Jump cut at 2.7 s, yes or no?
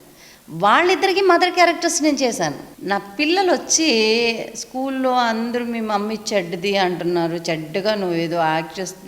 yes